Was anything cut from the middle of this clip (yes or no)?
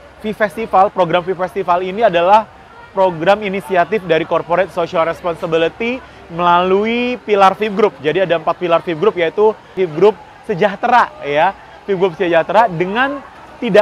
yes